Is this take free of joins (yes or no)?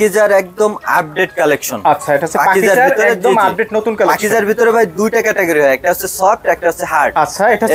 yes